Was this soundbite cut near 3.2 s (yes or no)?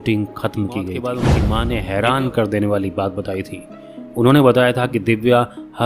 no